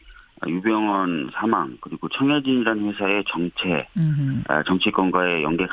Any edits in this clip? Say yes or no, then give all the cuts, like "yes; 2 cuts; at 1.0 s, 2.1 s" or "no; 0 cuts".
yes; 1 cut; at 2.4 s